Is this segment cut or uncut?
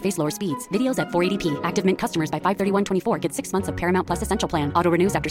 uncut